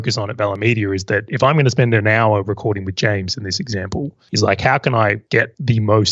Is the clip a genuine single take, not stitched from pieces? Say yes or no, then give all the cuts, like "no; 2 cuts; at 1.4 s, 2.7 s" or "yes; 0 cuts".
yes; 0 cuts